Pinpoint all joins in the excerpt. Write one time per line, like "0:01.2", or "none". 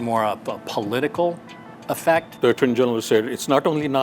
0:02.3